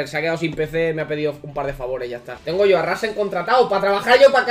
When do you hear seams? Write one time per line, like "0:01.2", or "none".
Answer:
0:02.3